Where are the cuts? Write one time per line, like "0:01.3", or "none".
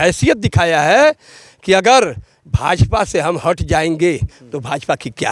none